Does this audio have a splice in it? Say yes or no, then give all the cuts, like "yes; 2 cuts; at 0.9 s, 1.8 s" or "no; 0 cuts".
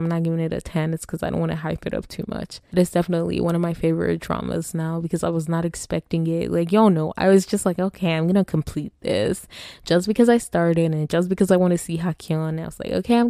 yes; 1 cut; at 2.7 s